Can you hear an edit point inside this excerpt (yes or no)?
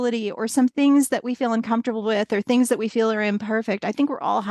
no